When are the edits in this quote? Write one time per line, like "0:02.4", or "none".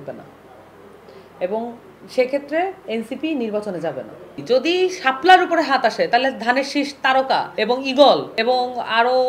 0:04.4
0:07.5
0:08.3